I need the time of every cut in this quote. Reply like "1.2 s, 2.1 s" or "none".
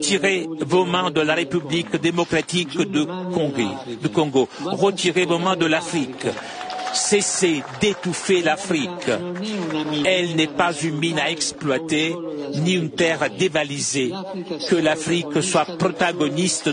none